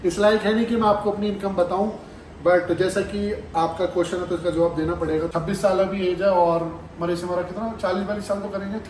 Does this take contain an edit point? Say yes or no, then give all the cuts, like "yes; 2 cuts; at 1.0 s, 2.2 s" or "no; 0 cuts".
yes; 1 cut; at 5.3 s